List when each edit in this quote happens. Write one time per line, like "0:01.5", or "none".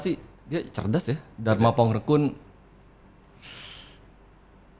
0:01.3